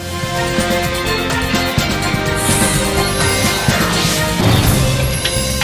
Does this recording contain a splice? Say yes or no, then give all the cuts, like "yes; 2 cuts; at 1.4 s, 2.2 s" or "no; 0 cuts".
no; 0 cuts